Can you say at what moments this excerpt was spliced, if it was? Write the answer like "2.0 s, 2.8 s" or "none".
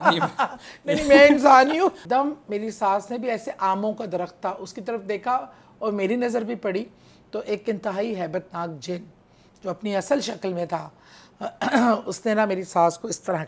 2.0 s